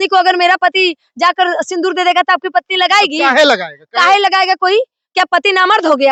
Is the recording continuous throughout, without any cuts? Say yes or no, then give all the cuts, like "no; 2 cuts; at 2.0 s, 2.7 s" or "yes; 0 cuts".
yes; 0 cuts